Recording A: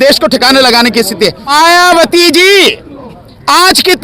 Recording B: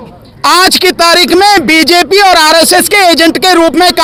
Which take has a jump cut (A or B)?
A